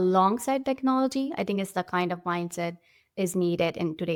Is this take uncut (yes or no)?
yes